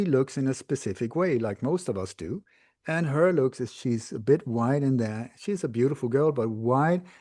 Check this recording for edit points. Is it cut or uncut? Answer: uncut